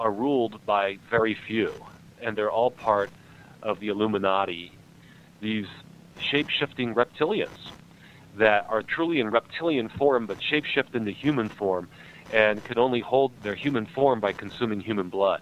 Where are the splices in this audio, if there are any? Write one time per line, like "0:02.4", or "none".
0:02.1
0:03.8
0:04.9
0:06.1
0:08.9
0:13.3